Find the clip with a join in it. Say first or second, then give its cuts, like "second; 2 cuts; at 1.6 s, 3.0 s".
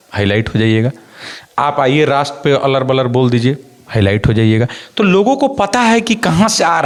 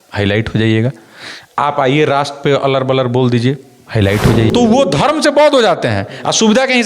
second; 1 cut; at 4.5 s